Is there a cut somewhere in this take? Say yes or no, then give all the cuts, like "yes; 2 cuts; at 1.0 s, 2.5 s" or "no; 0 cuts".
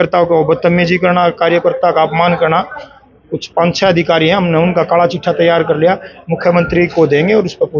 no; 0 cuts